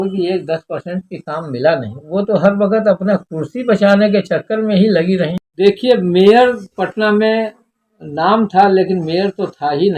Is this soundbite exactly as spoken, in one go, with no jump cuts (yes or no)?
no